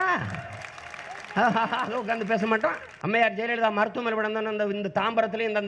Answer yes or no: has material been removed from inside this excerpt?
yes